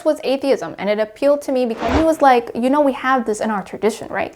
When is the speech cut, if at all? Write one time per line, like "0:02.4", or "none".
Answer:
0:01.9